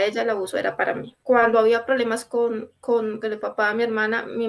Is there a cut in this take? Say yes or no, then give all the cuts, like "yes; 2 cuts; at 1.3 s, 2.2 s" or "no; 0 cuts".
yes; 1 cut; at 1.1 s